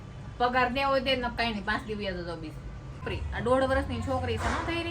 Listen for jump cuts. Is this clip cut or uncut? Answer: cut